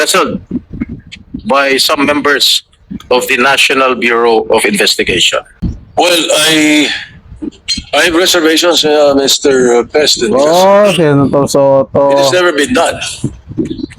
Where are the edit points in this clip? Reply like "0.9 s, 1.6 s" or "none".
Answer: 5.5 s